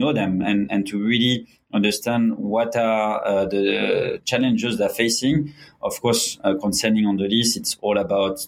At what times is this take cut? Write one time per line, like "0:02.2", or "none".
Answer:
none